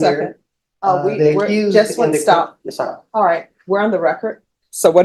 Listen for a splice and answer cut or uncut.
uncut